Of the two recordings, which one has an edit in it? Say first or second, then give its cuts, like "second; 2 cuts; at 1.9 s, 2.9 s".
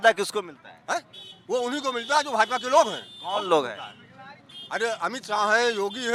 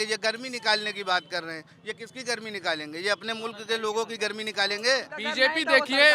second; 1 cut; at 5.2 s